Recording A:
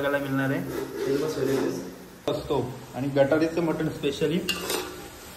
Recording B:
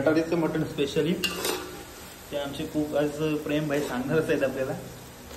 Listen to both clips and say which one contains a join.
A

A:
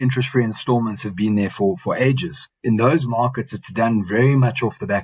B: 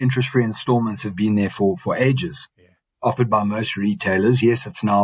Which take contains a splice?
A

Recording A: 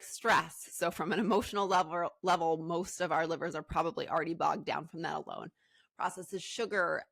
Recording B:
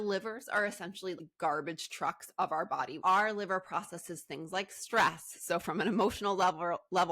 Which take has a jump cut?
B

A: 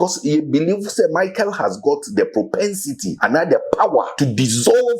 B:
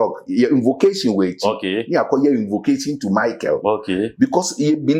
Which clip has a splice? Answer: A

